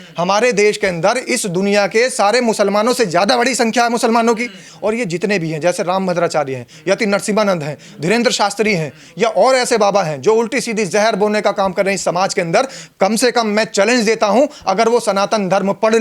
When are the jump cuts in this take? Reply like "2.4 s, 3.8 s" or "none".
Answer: 4.7 s